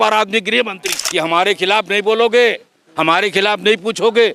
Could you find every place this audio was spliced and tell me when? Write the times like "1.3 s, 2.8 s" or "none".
1.0 s